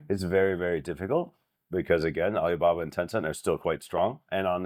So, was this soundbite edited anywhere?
no; 0 cuts

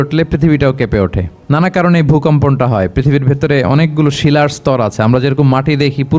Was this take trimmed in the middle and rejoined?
yes; 1 cut; at 1.3 s

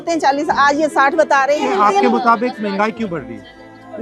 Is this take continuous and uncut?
yes; 0 cuts

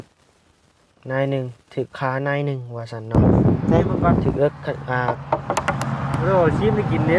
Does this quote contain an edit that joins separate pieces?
yes; 1 cut; at 5.1 s

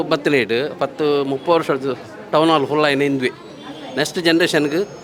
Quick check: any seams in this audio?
no; 0 cuts

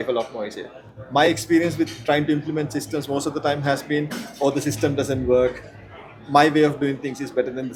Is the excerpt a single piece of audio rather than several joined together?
yes; 0 cuts

